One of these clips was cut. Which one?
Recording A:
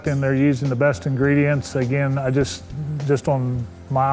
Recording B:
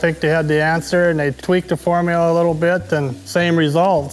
B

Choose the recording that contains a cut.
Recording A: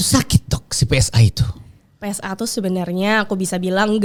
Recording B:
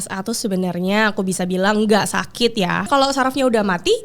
B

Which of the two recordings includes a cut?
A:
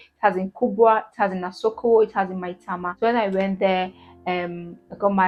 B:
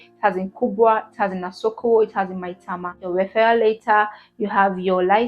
B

